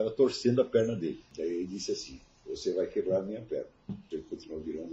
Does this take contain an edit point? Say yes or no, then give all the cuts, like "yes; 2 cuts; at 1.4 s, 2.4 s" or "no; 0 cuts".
yes; 2 cuts; at 1.3 s, 3.9 s